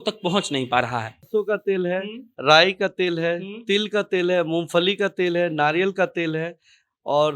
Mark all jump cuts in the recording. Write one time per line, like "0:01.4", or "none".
0:01.3